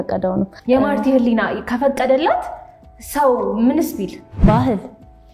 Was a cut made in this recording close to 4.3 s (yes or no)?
yes